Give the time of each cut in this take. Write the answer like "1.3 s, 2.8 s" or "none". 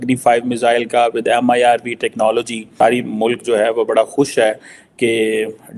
2.6 s